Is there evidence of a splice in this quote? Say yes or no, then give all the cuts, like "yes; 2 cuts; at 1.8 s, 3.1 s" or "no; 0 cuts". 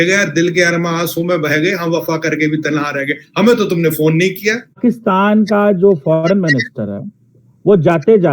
no; 0 cuts